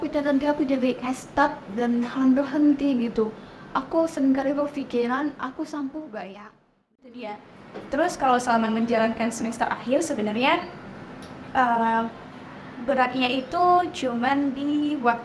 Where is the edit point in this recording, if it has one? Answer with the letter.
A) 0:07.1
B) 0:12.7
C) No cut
A